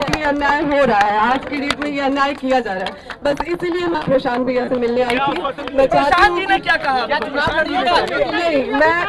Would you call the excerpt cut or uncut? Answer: uncut